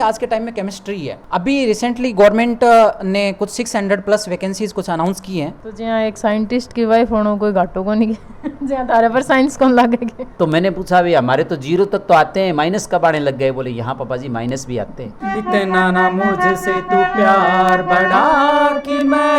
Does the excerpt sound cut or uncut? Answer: cut